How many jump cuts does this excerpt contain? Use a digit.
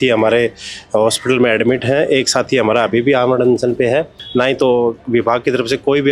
1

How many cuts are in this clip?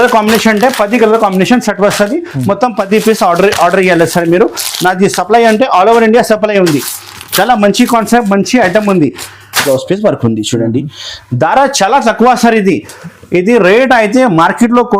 1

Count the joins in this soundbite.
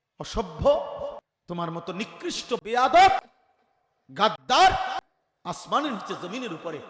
1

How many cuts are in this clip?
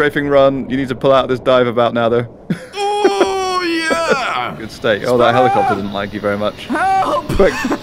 1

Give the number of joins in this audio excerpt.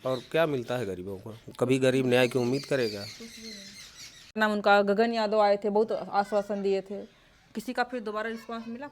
1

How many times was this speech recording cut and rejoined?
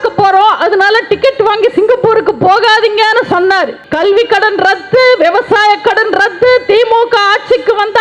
1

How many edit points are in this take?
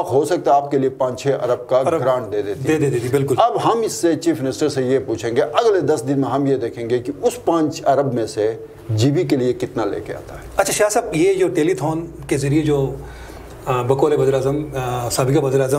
0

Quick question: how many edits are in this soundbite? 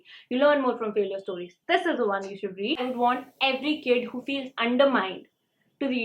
1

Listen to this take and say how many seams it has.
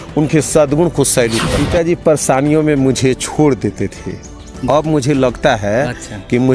1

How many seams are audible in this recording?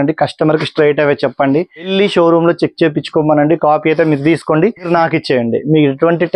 2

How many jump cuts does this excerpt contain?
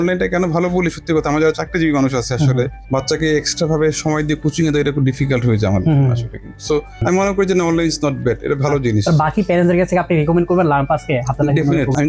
1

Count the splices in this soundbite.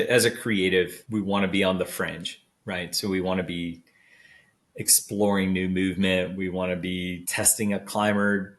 2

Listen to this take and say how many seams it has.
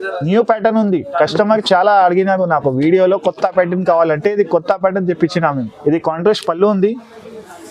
1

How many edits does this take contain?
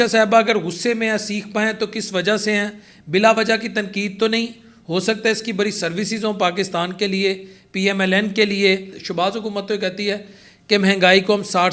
1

